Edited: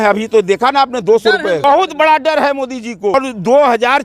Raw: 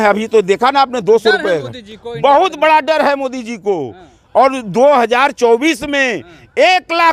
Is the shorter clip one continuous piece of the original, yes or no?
no